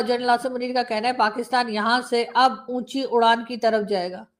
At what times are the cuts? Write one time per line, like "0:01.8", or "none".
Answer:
none